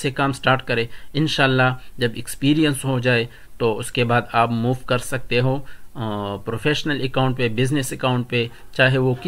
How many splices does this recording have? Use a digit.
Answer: 0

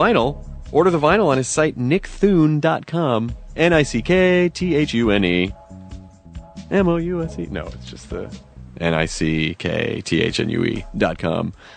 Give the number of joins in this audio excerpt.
0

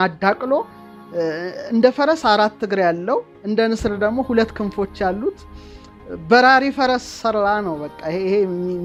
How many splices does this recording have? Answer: 0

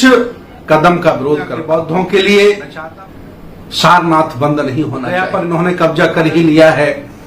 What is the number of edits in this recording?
2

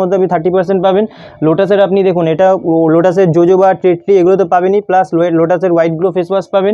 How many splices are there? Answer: 0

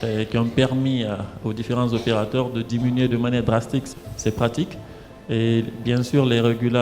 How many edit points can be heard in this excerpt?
1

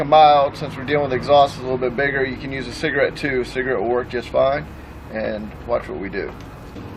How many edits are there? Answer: 1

